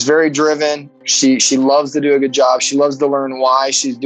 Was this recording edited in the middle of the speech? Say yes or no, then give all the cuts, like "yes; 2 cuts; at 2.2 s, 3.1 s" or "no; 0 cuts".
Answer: yes; 1 cut; at 0.9 s